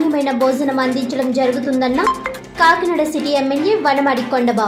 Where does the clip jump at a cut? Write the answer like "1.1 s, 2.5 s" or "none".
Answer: none